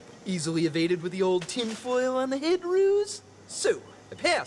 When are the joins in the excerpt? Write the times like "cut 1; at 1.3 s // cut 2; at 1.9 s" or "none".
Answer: none